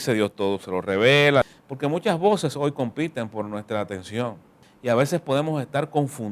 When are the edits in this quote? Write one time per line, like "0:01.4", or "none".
0:01.4
0:04.5